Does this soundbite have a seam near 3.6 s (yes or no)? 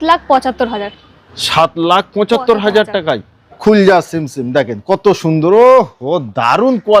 yes